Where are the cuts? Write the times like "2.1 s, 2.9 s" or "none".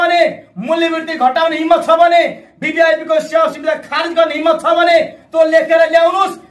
none